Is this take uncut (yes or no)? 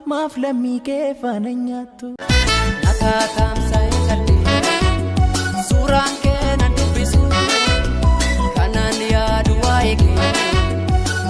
no